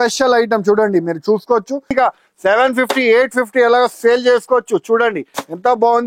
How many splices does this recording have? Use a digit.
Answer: 1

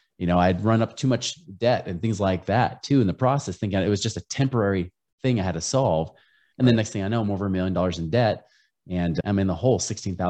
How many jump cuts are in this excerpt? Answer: 1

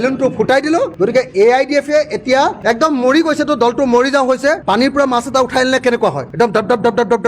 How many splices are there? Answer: 0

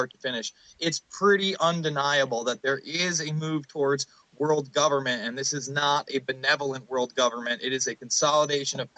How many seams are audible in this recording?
1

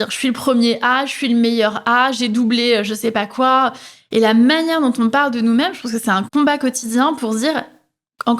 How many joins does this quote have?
1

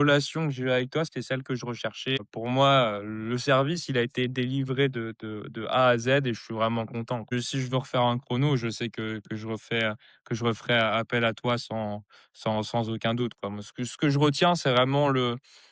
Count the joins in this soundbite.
2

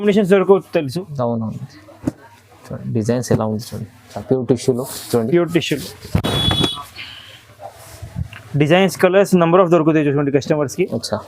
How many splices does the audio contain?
1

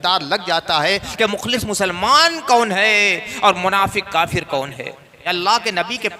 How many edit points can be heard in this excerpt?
1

